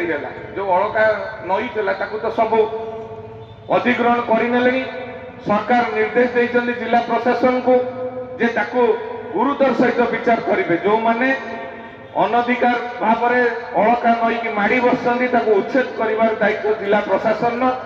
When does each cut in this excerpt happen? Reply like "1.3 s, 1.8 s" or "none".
none